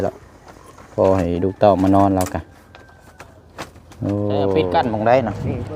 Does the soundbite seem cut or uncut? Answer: cut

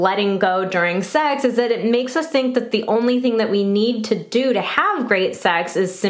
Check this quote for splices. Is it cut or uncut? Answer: uncut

